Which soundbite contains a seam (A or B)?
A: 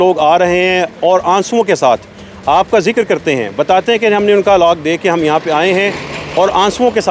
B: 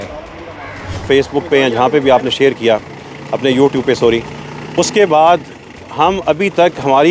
B